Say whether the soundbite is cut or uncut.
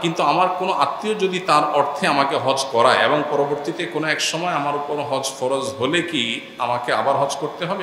uncut